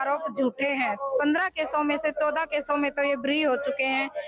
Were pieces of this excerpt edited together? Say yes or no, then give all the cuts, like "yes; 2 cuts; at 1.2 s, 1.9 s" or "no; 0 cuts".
no; 0 cuts